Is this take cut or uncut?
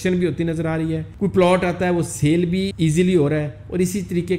cut